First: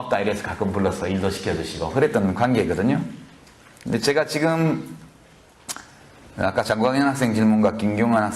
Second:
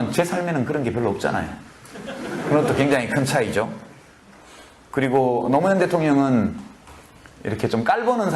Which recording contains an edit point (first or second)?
second